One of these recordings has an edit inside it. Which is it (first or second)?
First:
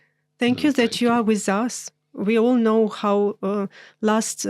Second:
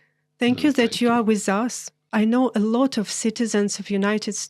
second